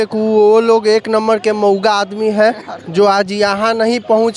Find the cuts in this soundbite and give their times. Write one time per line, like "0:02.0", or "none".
none